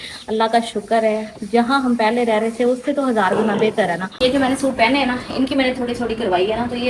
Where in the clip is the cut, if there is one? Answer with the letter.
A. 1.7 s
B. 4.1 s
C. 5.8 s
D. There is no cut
B